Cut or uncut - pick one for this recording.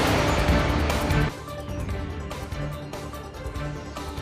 cut